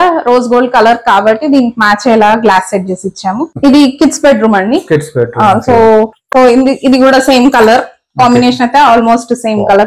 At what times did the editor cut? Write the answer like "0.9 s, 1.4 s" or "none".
3.5 s